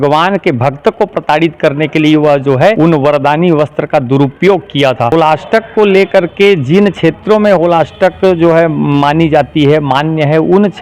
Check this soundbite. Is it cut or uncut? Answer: cut